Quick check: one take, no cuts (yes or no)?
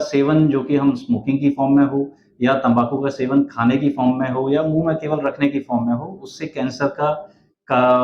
yes